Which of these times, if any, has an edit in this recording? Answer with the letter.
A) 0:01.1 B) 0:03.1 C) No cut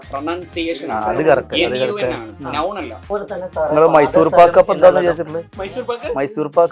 B